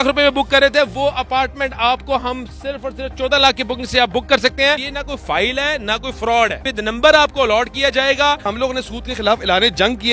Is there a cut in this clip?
yes; 3 cuts; at 4.9 s, 6.7 s, 8.5 s

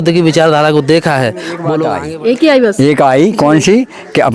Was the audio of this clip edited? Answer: yes; 1 cut; at 1.9 s

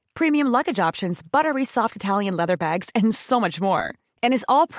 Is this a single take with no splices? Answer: yes; 0 cuts

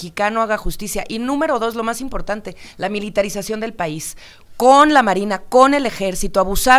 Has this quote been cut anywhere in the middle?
no; 0 cuts

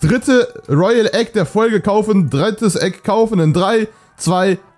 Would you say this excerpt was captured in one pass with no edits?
yes; 0 cuts

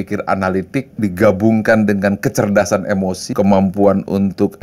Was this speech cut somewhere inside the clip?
yes; 2 cuts; at 1.0 s, 3.3 s

